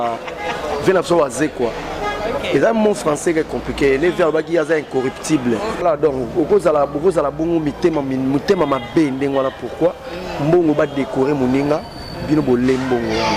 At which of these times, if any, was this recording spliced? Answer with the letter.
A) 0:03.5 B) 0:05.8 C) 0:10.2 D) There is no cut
B